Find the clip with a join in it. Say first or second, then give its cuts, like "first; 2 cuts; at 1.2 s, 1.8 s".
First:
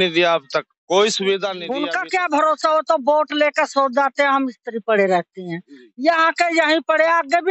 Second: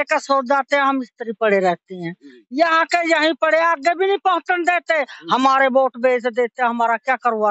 first; 1 cut; at 1.7 s